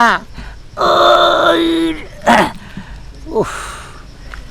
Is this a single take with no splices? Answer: yes; 0 cuts

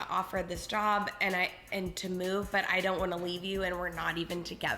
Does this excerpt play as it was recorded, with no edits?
yes; 0 cuts

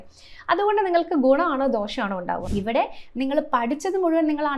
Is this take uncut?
no; 1 cut; at 2.4 s

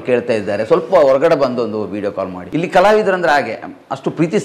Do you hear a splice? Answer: yes; 1 cut; at 2.4 s

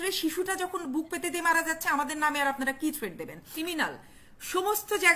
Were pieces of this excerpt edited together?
yes; 1 cut; at 3.5 s

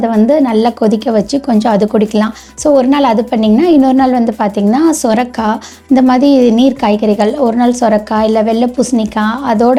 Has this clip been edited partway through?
no; 0 cuts

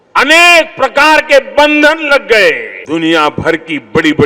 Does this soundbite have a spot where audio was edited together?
yes; 1 cut; at 2.8 s

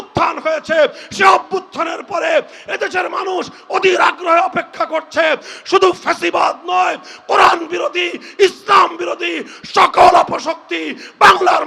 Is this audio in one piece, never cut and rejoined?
yes; 0 cuts

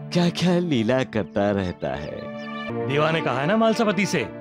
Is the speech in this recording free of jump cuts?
no; 1 cut; at 2.7 s

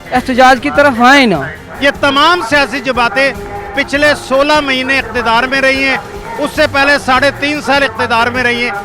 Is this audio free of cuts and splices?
no; 1 cut; at 1.6 s

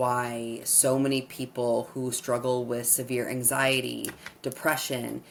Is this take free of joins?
yes; 0 cuts

